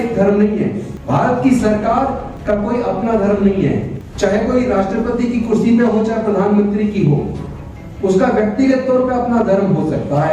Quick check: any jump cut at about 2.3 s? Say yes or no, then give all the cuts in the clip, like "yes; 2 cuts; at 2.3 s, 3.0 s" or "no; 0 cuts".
yes; 3 cuts; at 0.9 s, 2.3 s, 4.0 s